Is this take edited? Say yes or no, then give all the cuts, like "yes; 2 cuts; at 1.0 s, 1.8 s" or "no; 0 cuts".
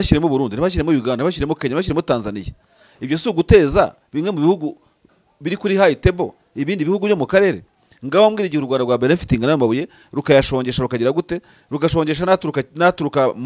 no; 0 cuts